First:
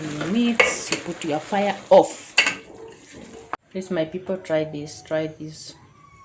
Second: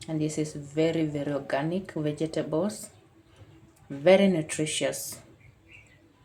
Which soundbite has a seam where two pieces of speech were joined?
first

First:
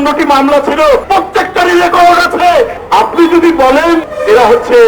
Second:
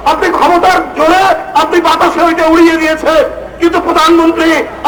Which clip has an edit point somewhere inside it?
first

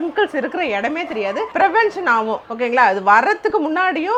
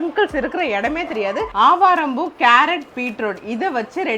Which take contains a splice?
second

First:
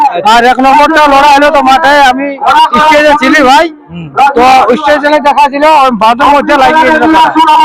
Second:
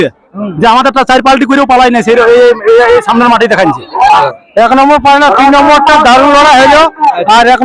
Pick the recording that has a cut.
second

